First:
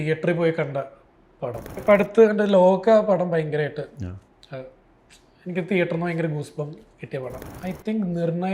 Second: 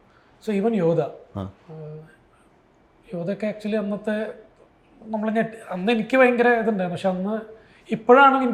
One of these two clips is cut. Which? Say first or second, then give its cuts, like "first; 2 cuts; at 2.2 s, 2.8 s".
first; 2 cuts; at 1.8 s, 7.5 s